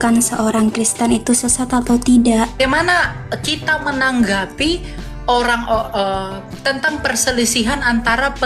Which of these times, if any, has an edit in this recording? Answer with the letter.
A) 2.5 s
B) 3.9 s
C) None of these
A